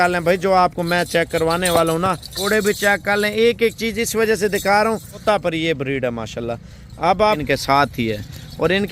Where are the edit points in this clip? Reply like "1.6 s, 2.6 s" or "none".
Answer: 2.3 s, 5.2 s, 7.4 s